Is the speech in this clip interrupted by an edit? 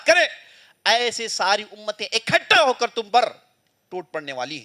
no; 0 cuts

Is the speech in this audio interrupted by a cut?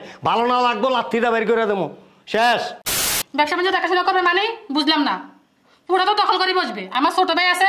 yes; 1 cut; at 2.9 s

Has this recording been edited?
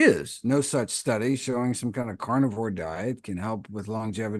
no; 0 cuts

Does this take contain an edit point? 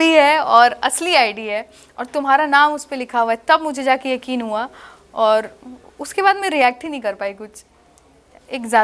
no; 0 cuts

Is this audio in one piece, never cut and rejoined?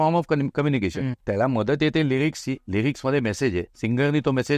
no; 3 cuts; at 1.1 s, 2.6 s, 3.7 s

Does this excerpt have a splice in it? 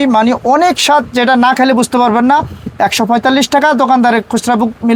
no; 0 cuts

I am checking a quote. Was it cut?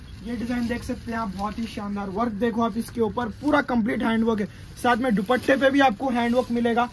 no; 0 cuts

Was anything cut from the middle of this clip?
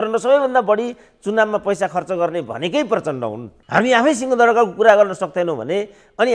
yes; 1 cut; at 3.5 s

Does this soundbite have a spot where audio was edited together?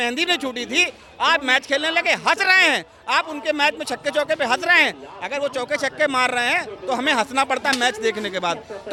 no; 0 cuts

